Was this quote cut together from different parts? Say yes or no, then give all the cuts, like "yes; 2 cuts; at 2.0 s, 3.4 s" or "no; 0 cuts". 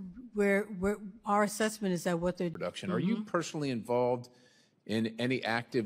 no; 0 cuts